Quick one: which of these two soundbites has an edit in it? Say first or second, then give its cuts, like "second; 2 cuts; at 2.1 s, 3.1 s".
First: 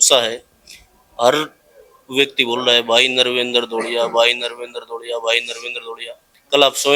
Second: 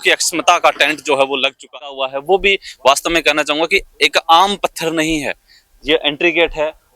second; 1 cut; at 1.8 s